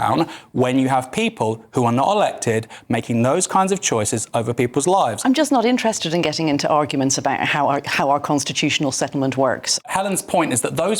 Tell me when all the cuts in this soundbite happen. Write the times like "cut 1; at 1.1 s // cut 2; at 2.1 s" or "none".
cut 1; at 5.2 s // cut 2; at 9.7 s